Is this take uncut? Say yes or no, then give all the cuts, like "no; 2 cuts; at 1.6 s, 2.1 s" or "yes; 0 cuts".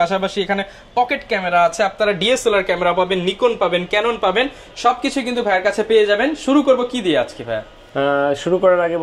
yes; 0 cuts